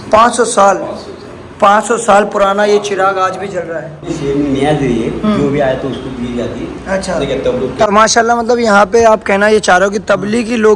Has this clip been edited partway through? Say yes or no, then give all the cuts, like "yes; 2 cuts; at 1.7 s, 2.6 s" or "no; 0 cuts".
yes; 2 cuts; at 4.1 s, 7.9 s